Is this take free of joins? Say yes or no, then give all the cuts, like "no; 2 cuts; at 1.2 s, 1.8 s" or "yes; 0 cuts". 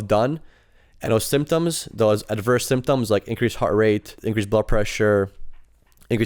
no; 1 cut; at 4.2 s